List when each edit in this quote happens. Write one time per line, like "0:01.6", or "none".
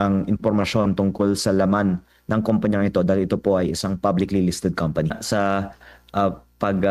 0:05.2